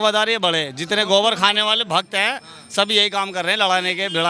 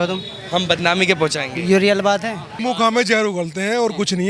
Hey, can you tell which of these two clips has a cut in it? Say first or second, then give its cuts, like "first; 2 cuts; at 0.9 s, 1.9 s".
second; 1 cut; at 2.5 s